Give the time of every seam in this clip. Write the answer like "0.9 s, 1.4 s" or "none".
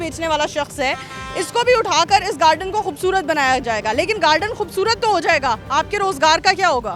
none

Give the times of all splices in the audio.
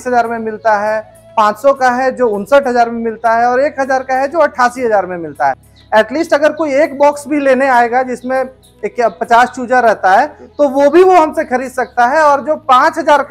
5.7 s

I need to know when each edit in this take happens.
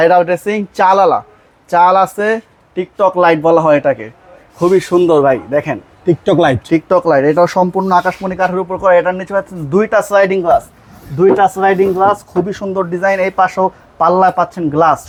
none

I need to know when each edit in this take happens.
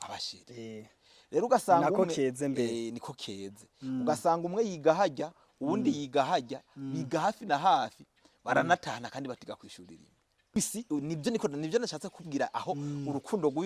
10.6 s

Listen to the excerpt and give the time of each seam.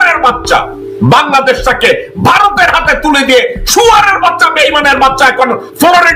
none

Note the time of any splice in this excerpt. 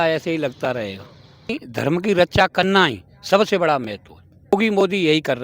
1.5 s, 4.5 s

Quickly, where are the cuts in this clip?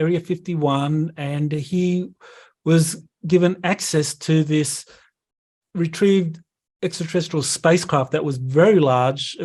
none

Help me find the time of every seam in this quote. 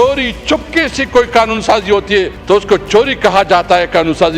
2.3 s

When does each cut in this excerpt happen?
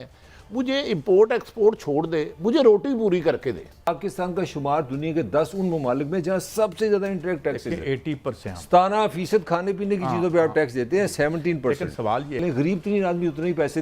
3.9 s, 8.5 s, 12.4 s

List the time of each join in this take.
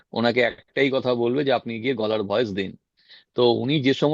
none

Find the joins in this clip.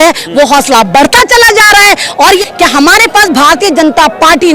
2.4 s

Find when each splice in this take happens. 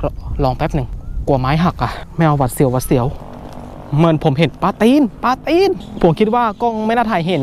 1.0 s, 2.0 s, 3.2 s, 5.9 s

